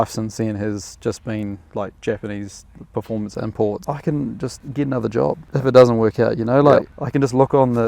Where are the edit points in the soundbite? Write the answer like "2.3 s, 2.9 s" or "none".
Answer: 3.8 s, 4.6 s, 5.4 s, 7.0 s